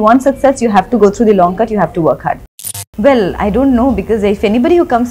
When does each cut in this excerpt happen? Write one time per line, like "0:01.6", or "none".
0:02.6